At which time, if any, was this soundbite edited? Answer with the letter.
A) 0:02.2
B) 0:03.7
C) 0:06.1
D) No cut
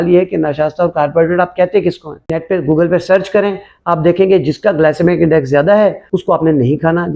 A